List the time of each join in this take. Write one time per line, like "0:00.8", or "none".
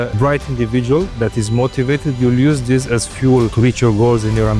none